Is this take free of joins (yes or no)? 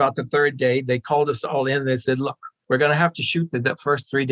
yes